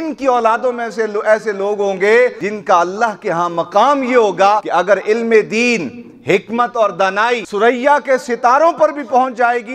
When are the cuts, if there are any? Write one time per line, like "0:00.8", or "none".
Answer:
0:02.5
0:04.6
0:07.5